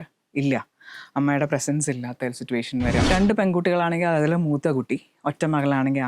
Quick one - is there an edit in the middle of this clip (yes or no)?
yes